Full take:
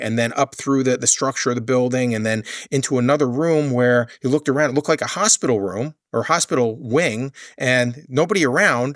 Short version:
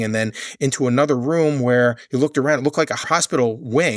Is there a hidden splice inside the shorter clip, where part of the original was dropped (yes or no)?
yes